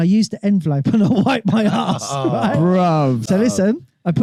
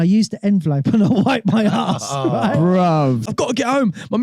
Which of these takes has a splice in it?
second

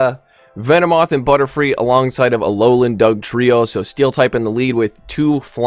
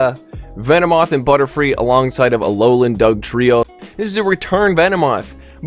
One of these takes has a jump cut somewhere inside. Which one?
second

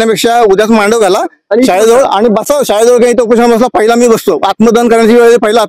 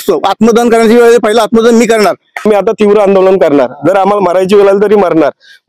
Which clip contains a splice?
second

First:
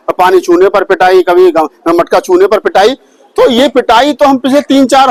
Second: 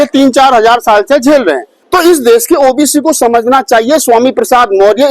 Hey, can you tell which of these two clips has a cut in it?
second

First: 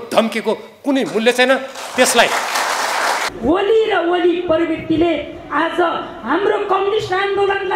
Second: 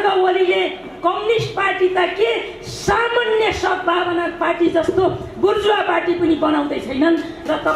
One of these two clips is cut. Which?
first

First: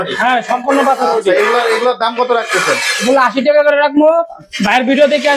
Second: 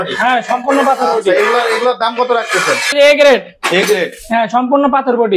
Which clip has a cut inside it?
second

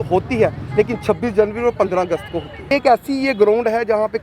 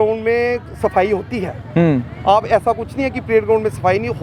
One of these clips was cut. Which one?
first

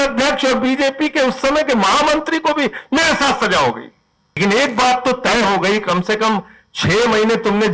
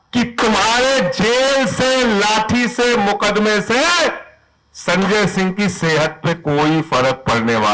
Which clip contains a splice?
first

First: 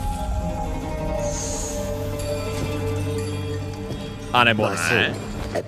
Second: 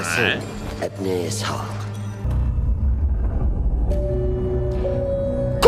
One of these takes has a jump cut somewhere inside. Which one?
second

